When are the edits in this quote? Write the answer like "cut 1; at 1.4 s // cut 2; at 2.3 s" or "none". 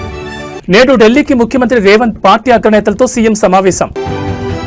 none